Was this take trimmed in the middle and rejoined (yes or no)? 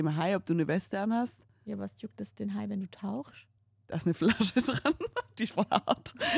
no